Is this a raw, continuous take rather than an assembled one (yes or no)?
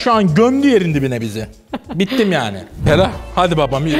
no